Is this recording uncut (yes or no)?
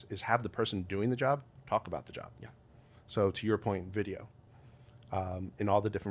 yes